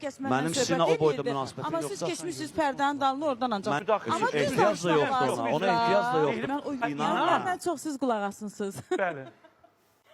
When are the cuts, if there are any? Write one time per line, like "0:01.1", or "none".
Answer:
0:03.8
0:06.8